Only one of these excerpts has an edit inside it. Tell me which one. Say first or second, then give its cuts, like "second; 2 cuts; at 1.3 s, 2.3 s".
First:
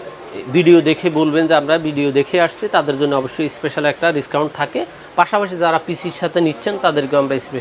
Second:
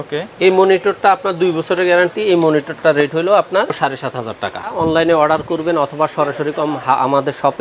second; 1 cut; at 4.7 s